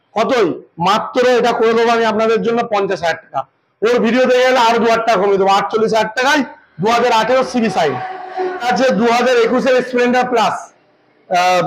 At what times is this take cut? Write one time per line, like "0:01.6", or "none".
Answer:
0:08.7